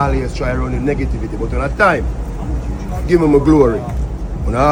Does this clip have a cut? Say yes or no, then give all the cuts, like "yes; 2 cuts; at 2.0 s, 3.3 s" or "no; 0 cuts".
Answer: no; 0 cuts